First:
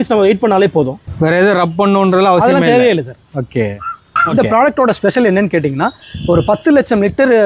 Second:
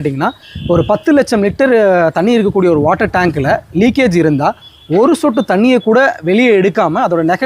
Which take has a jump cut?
first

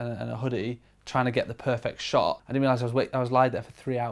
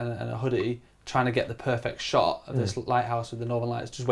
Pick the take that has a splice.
first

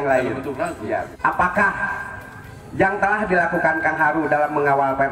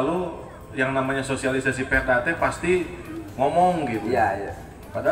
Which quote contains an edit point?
first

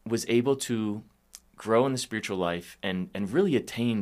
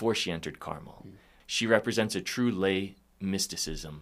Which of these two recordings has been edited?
second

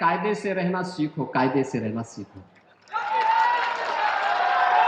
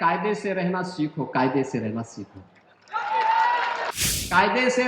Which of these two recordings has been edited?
second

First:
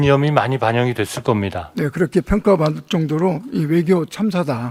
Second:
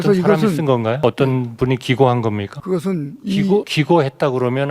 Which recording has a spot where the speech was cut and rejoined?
second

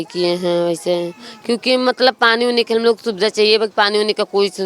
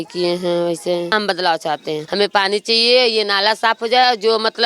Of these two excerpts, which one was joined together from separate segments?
second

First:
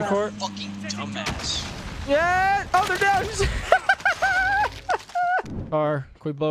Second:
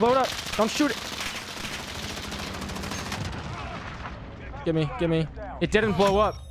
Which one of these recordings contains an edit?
first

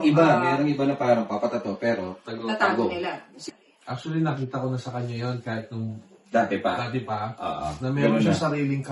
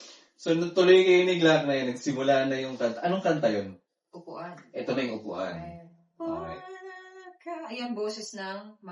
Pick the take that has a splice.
first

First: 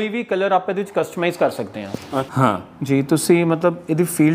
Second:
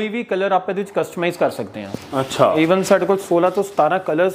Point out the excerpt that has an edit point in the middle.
first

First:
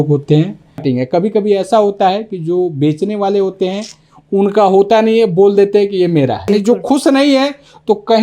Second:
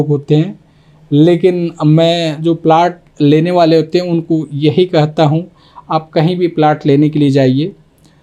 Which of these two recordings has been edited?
first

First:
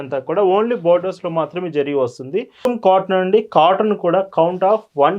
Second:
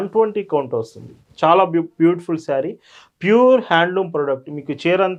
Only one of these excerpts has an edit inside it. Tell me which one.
first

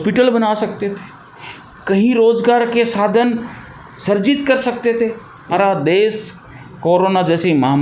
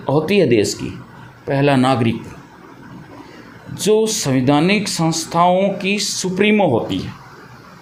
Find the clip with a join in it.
first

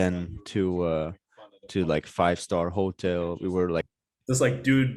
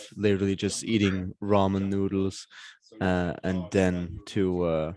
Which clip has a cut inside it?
first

